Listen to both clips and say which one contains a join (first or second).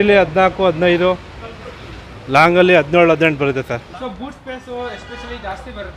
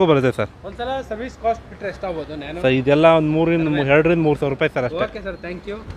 first